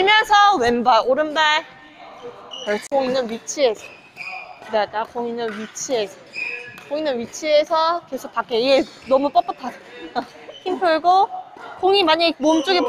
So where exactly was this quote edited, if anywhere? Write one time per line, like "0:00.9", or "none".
0:02.9